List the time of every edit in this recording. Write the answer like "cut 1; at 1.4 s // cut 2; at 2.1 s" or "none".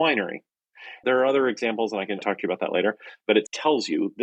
none